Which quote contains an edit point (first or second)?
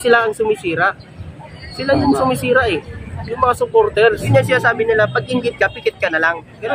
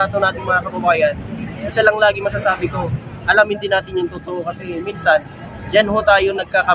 first